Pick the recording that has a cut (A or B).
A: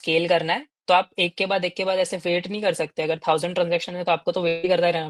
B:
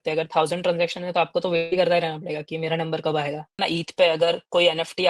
B